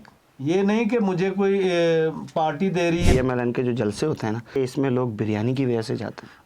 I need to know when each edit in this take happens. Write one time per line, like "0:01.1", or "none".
0:03.1
0:04.6